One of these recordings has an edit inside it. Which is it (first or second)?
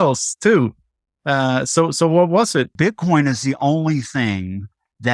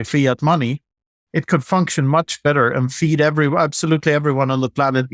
first